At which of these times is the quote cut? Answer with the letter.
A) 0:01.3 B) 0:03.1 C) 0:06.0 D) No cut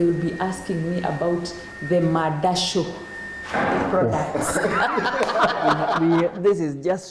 C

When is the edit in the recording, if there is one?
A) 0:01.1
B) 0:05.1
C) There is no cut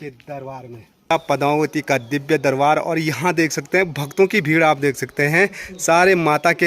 A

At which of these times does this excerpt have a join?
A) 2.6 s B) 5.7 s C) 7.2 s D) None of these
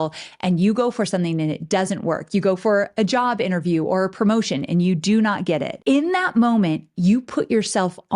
B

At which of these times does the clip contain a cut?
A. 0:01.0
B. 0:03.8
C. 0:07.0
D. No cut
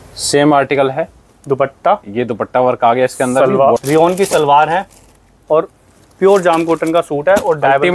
B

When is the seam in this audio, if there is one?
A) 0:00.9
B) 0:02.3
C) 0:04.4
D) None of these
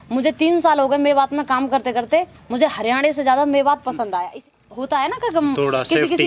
C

